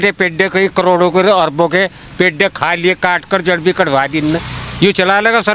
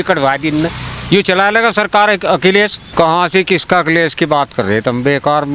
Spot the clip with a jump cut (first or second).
second